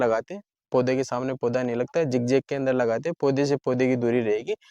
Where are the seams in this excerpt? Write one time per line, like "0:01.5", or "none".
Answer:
none